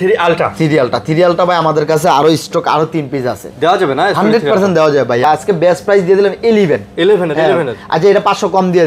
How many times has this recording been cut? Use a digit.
1